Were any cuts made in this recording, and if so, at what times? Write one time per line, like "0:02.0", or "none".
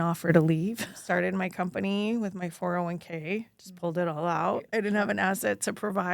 0:00.9
0:04.7